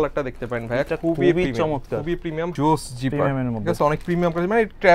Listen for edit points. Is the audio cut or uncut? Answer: cut